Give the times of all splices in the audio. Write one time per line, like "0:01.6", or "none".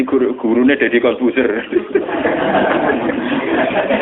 none

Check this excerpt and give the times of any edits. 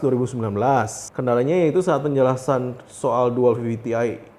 0:01.0

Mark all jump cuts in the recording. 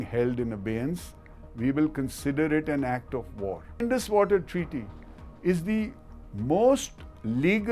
0:03.8

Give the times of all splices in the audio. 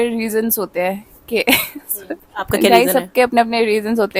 none

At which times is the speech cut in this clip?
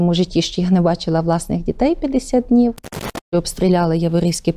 0:02.9

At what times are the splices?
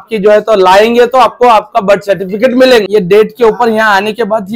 0:02.9

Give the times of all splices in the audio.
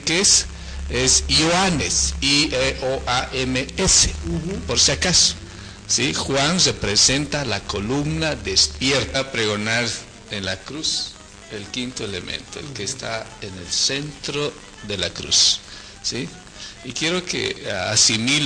none

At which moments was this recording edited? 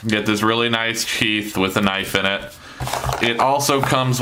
none

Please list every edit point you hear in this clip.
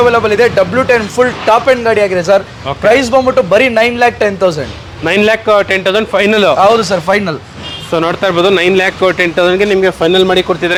none

